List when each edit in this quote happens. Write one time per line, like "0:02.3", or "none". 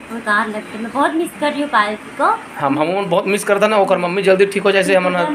none